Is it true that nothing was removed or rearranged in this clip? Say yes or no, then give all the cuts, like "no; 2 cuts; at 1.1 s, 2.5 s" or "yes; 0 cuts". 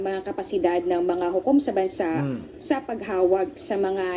yes; 0 cuts